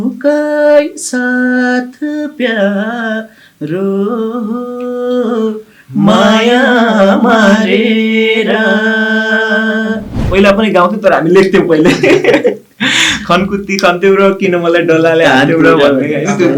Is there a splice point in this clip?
yes; 1 cut; at 10.1 s

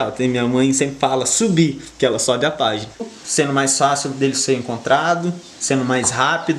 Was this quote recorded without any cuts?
no; 1 cut; at 3.0 s

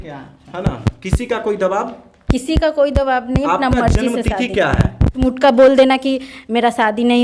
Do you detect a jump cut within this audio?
yes; 1 cut; at 5.2 s

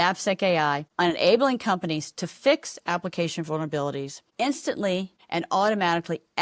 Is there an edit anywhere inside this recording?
yes; 3 cuts; at 0.9 s, 4.2 s, 5.2 s

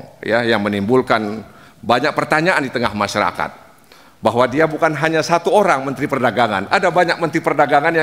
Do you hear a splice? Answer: no; 0 cuts

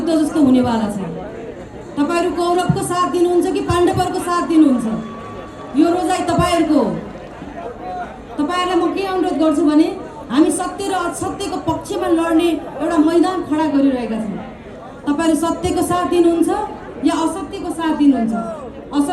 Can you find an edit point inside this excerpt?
no; 0 cuts

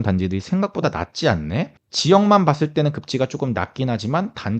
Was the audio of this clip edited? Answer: yes; 1 cut; at 1.8 s

